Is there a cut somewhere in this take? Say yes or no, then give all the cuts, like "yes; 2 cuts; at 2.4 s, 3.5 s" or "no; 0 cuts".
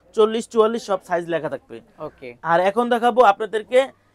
no; 0 cuts